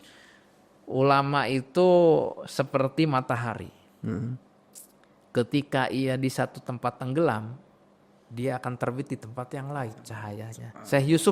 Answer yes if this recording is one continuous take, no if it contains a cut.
yes